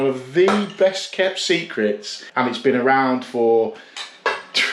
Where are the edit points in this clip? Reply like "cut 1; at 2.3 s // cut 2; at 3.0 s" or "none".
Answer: cut 1; at 2.2 s